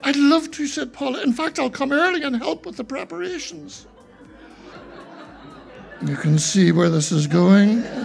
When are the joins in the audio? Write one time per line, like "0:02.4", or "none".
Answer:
0:04.7